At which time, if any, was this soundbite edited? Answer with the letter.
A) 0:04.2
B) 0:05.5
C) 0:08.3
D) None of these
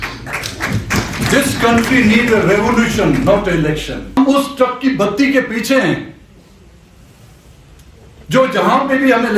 A